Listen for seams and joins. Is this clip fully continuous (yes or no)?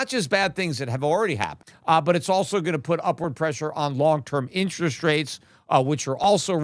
no